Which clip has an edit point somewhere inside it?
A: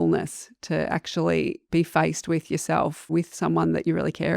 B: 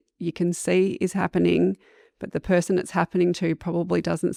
A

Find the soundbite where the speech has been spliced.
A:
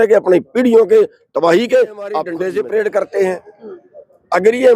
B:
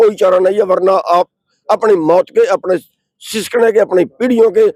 A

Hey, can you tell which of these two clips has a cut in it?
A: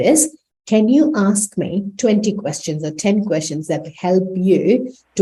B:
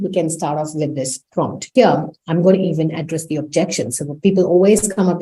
B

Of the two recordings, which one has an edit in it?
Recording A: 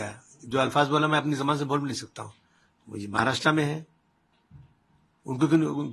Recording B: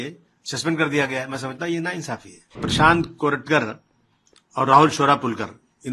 B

